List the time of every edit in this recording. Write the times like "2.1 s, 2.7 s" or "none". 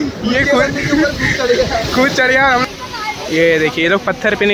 2.6 s